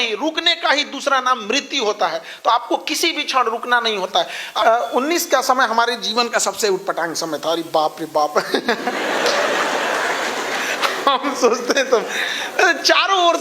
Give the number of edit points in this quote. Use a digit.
1